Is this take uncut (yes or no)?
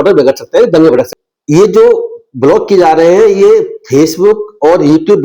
no